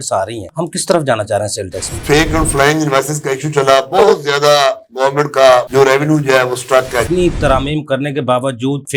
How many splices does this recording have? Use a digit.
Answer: 2